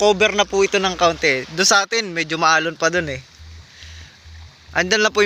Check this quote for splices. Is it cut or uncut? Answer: uncut